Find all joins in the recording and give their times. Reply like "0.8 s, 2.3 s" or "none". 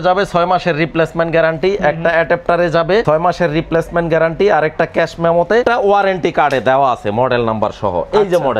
3.0 s, 5.6 s